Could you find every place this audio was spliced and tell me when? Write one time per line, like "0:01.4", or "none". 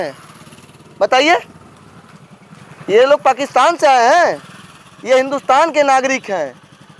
none